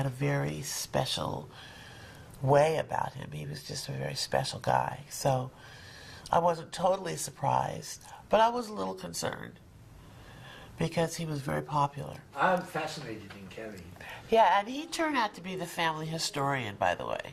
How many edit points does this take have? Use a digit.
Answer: 1